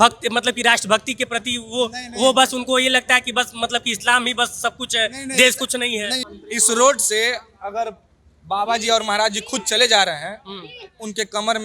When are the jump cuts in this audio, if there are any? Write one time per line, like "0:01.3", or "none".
0:06.2